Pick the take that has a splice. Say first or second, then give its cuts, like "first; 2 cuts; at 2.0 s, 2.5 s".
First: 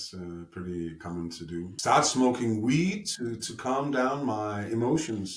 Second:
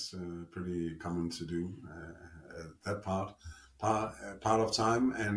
first; 1 cut; at 1.7 s